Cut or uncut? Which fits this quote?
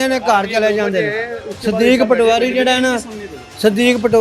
uncut